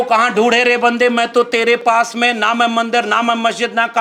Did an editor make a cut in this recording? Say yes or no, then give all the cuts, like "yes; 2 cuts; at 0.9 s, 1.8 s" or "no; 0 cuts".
no; 0 cuts